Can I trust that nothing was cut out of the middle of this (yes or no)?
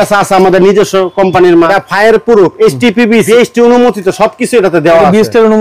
no